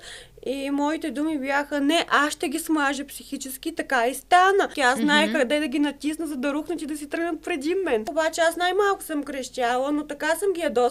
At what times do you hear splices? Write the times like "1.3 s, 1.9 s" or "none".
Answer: 4.7 s, 8.1 s